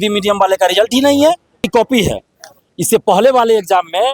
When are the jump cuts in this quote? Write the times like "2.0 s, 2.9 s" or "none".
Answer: 1.7 s